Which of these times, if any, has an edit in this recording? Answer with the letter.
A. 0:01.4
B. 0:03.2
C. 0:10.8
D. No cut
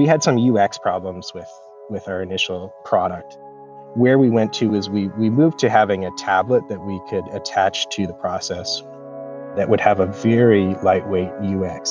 B